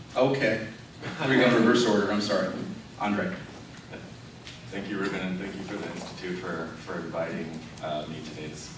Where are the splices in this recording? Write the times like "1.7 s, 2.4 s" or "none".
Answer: none